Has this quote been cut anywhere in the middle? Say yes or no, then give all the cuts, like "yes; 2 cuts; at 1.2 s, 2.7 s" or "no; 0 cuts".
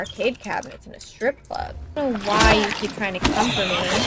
yes; 1 cut; at 1.8 s